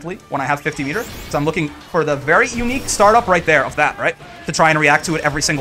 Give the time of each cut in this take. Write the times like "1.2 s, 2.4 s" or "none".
none